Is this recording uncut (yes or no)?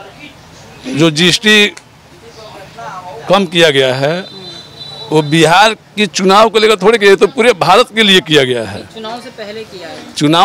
yes